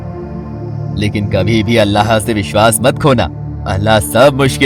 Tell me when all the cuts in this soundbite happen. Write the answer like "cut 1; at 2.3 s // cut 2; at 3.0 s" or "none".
none

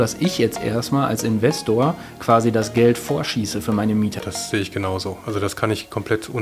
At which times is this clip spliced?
cut 1; at 4.1 s

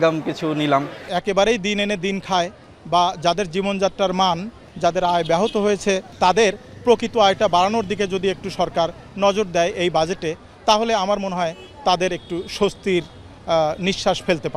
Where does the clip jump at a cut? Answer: cut 1; at 1.0 s // cut 2; at 4.6 s // cut 3; at 6.1 s

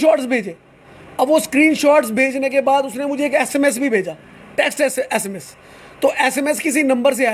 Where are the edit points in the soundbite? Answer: none

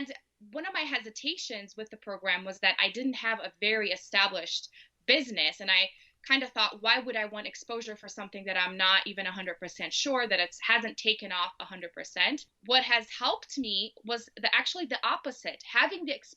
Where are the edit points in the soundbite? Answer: cut 1; at 12.5 s

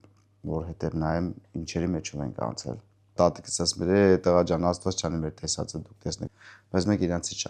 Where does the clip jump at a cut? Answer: cut 1; at 3.1 s // cut 2; at 6.3 s

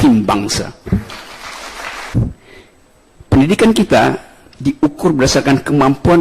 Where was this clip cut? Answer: cut 1; at 2.1 s

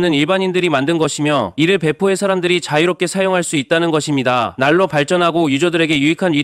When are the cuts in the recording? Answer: cut 1; at 1.5 s // cut 2; at 4.5 s

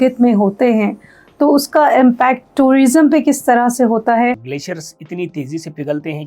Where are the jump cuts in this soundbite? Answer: cut 1; at 4.5 s

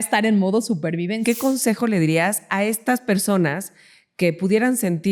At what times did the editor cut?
cut 1; at 1.2 s

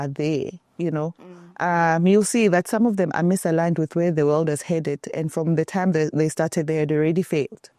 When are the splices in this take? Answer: none

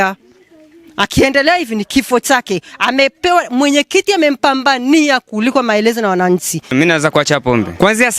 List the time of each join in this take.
cut 1; at 6.6 s

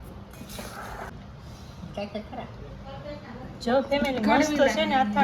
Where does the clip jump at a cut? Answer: cut 1; at 1.2 s

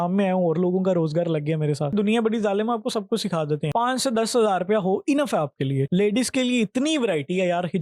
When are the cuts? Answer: cut 1; at 1.9 s // cut 2; at 3.7 s

